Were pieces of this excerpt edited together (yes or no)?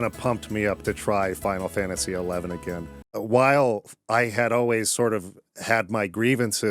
yes